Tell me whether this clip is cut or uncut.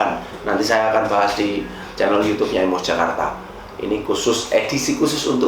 uncut